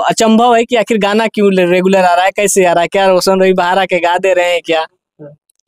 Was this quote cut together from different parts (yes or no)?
no